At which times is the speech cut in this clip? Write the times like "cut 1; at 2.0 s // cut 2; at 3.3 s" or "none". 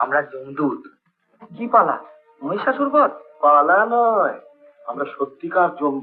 none